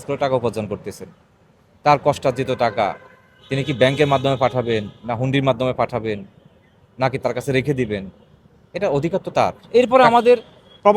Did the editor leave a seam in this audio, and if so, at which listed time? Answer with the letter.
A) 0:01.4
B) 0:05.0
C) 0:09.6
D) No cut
C